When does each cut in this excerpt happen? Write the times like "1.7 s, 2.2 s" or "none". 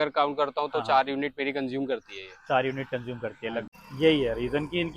3.6 s